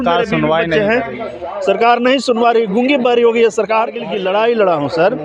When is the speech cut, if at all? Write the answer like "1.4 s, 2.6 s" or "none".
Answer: 4.0 s

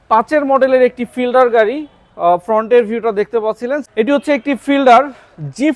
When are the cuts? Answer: 3.9 s

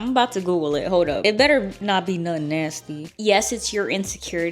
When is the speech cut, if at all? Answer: 1.2 s, 3.1 s

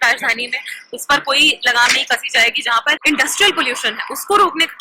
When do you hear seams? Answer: 3.0 s

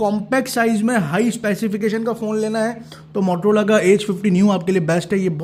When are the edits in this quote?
none

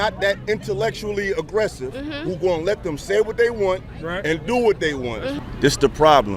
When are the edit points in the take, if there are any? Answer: 5.3 s

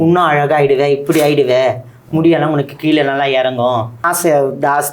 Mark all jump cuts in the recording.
4.0 s

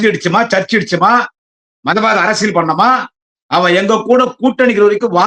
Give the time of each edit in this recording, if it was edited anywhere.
none

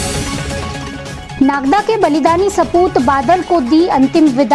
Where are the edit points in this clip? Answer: 1.2 s

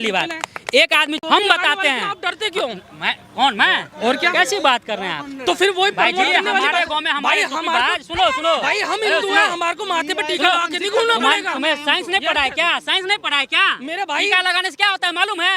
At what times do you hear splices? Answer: 1.2 s

